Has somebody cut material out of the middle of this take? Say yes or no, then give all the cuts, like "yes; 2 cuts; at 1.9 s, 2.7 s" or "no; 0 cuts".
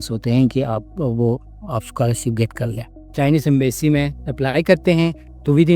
yes; 1 cut; at 3.1 s